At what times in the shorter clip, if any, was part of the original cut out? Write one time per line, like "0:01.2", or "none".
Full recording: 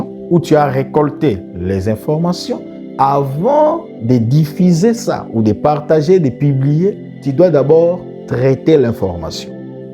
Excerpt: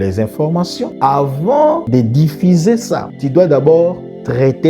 0:00.9
0:01.8
0:03.1